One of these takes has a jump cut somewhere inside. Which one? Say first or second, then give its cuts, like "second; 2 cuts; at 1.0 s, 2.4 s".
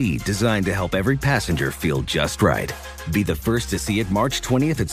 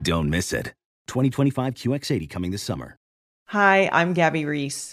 second; 1 cut; at 3.1 s